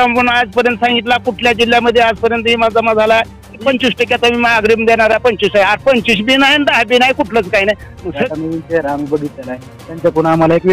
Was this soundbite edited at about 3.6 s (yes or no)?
yes